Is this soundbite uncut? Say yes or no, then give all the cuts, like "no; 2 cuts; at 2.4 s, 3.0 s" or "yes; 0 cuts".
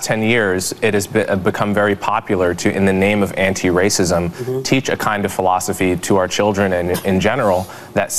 yes; 0 cuts